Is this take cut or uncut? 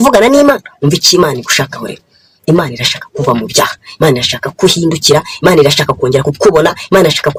uncut